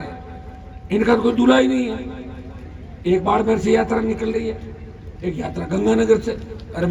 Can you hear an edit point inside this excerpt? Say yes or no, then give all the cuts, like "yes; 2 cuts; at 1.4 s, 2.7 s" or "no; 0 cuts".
no; 0 cuts